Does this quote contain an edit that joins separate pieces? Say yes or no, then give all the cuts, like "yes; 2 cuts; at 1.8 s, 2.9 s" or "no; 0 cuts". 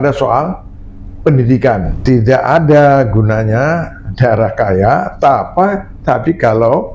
yes; 1 cut; at 1.9 s